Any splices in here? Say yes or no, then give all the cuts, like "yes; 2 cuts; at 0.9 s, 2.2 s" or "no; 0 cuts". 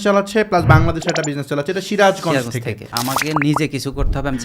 yes; 1 cut; at 2.9 s